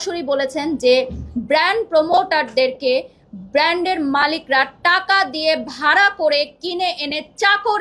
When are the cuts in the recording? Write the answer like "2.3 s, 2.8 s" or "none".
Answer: none